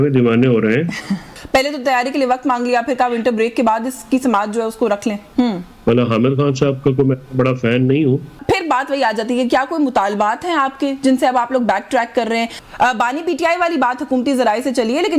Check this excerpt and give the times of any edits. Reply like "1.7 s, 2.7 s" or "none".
1.3 s, 5.3 s, 8.4 s, 12.6 s